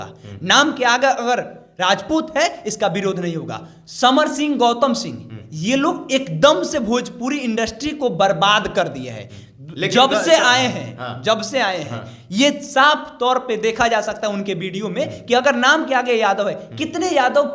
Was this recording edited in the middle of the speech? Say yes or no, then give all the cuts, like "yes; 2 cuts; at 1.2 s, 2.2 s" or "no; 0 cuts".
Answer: no; 0 cuts